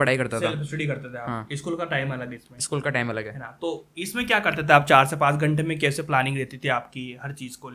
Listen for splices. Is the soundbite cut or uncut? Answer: uncut